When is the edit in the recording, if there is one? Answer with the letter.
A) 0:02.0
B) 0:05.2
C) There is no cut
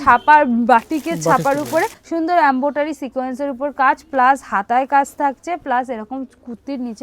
A